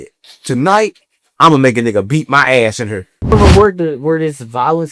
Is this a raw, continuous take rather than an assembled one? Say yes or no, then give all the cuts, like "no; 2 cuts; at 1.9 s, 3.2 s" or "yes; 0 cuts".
no; 1 cut; at 3.3 s